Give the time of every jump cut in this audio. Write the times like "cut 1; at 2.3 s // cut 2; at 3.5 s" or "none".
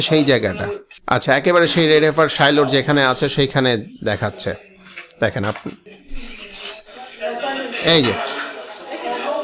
cut 1; at 0.9 s // cut 2; at 5.9 s